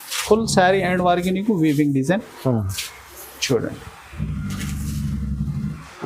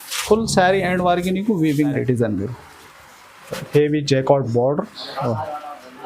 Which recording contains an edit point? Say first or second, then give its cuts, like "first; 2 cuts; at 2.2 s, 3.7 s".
second; 1 cut; at 1.9 s